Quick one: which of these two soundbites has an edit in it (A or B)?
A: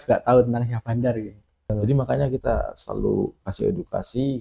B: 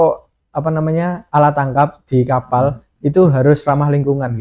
A